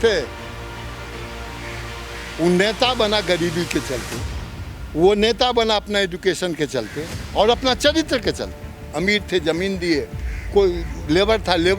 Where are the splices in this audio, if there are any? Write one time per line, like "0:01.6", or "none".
0:08.9